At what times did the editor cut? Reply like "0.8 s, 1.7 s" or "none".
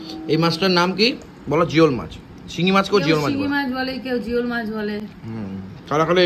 none